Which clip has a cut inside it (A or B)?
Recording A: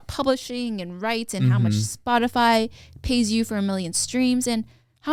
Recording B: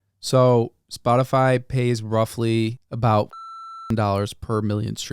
B